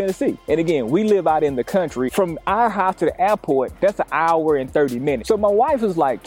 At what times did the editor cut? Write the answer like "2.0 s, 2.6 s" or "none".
2.1 s, 5.2 s